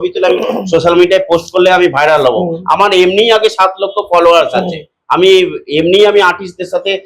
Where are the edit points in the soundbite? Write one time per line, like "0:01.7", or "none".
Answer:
none